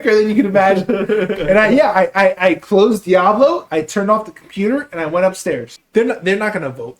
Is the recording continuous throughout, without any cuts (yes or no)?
no